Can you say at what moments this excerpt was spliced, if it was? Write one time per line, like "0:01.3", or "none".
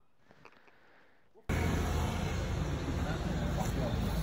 0:01.5